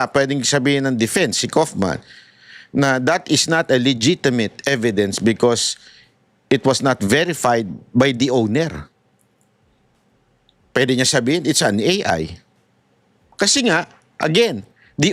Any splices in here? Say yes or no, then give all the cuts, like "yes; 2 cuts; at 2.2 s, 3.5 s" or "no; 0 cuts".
no; 0 cuts